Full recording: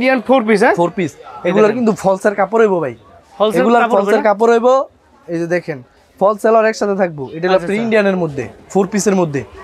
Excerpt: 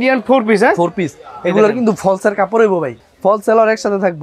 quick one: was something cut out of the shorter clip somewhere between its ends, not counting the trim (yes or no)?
yes